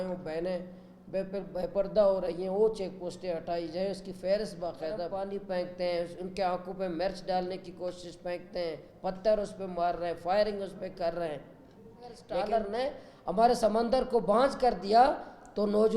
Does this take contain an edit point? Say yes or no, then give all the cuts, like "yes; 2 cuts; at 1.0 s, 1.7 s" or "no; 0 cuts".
yes; 2 cuts; at 5.1 s, 12.4 s